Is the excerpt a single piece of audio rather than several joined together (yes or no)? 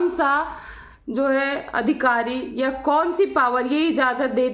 yes